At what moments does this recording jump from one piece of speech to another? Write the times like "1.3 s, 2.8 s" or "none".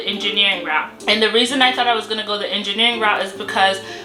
none